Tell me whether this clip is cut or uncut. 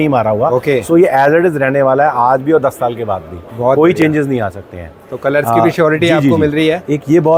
uncut